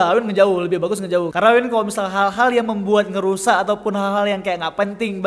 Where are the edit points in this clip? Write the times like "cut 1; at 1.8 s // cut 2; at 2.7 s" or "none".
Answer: cut 1; at 1.3 s